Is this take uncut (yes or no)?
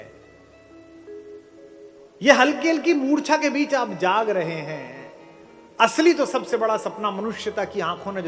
yes